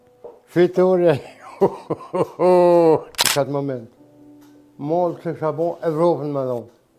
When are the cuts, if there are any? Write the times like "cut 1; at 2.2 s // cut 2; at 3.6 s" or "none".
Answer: cut 1; at 3.2 s

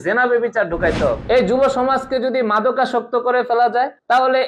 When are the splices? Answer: cut 1; at 1.2 s

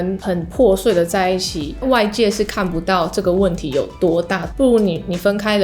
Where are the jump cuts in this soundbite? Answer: cut 1; at 1.6 s // cut 2; at 4.4 s

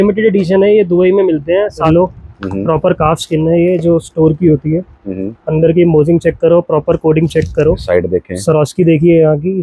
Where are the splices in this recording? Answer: cut 1; at 1.9 s // cut 2; at 7.8 s

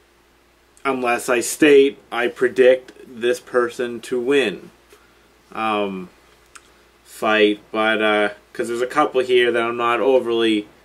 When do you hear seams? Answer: none

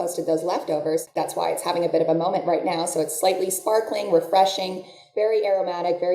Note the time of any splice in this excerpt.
cut 1; at 1.1 s

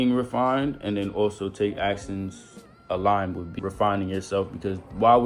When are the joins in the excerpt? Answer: cut 1; at 3.5 s

